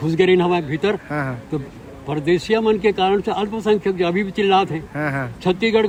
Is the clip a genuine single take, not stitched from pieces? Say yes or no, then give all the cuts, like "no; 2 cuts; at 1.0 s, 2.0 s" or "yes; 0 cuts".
yes; 0 cuts